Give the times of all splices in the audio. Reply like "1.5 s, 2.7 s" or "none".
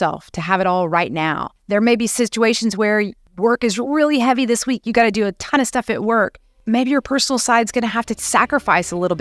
1.5 s, 3.2 s, 6.5 s